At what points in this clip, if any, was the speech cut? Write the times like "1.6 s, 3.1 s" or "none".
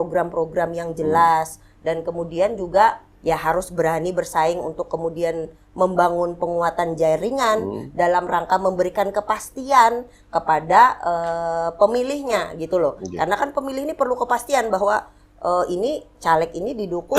none